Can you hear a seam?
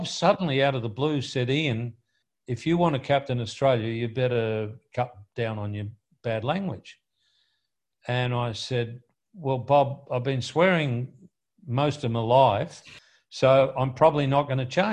yes; 1 cut; at 12.9 s

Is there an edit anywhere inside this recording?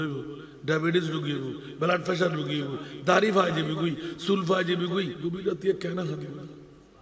yes; 1 cut; at 5.1 s

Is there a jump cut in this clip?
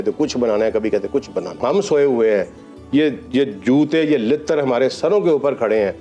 yes; 1 cut; at 1.6 s

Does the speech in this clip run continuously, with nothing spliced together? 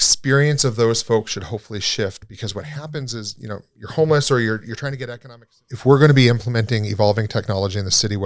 no; 1 cut; at 5.0 s

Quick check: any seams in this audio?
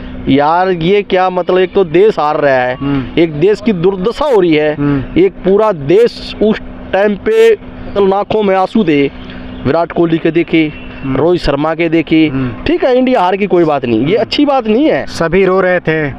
yes; 1 cut; at 7.9 s

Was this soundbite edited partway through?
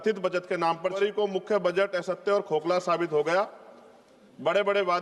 yes; 1 cut; at 1.0 s

